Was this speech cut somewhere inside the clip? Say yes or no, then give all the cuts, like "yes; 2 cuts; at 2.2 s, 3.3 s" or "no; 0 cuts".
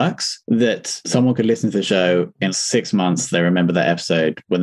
no; 0 cuts